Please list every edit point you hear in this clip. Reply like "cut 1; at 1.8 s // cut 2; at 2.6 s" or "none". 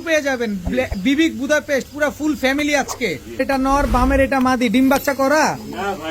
cut 1; at 3.4 s